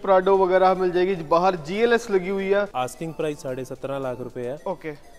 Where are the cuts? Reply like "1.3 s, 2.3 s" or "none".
2.7 s